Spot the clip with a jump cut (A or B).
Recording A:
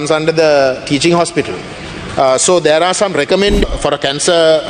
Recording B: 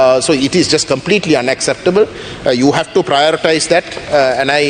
A